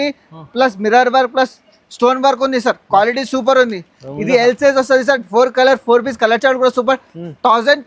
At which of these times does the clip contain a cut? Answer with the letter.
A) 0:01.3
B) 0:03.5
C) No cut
C